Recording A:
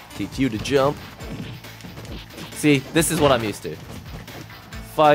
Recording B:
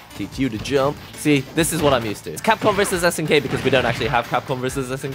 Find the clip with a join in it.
B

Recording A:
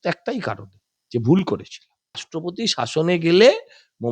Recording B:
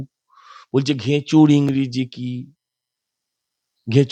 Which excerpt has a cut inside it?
A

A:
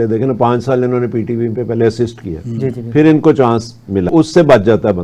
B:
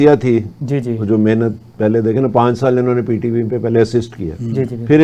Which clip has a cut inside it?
A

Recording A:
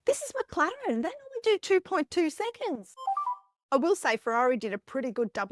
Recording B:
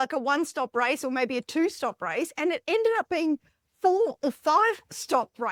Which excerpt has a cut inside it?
A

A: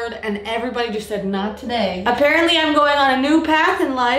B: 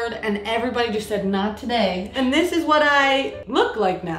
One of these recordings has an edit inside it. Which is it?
B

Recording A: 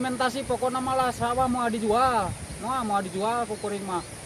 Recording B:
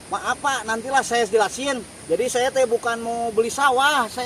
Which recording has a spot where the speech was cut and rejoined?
B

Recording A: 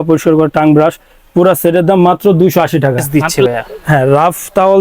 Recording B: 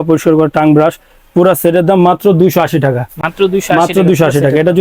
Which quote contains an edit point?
A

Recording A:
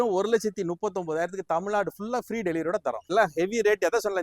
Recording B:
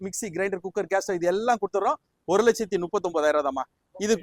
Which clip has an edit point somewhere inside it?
A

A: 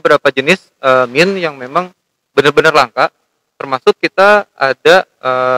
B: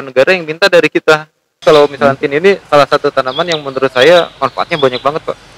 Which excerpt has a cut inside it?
B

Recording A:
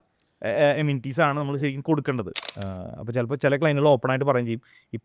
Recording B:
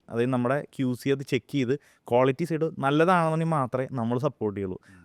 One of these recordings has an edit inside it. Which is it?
A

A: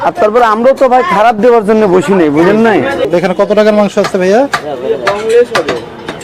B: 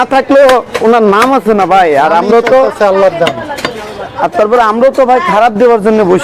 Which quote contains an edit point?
A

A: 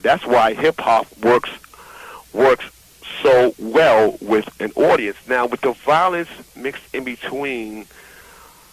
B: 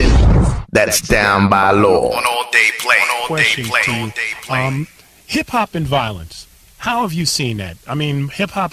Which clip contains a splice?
A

